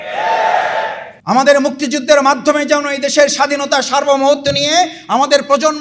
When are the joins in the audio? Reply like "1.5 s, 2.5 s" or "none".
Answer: 1.1 s